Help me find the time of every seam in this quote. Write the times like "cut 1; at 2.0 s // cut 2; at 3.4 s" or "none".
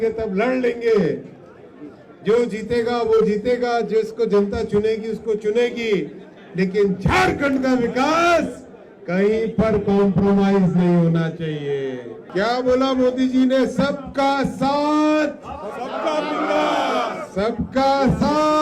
cut 1; at 12.2 s